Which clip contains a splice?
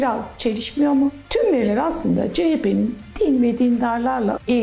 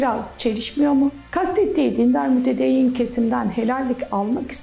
first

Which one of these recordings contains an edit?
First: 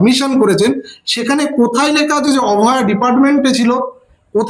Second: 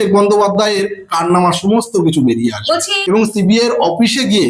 second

